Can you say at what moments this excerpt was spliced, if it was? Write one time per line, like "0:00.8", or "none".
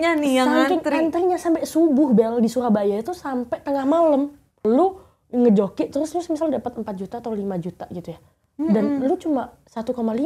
0:04.6